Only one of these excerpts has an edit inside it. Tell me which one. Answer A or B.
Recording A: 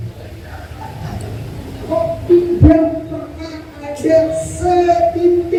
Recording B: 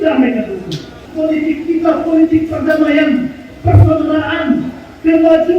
B